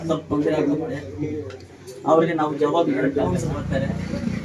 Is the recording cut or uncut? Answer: cut